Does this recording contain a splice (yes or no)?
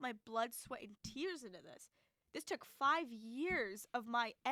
no